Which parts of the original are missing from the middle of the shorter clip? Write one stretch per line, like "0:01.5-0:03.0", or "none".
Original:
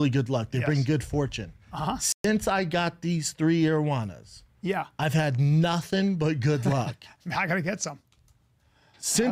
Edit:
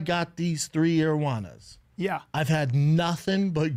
none